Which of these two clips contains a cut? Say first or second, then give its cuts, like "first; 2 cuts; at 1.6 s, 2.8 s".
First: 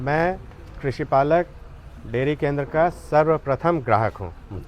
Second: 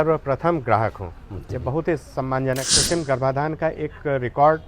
second; 1 cut; at 2.7 s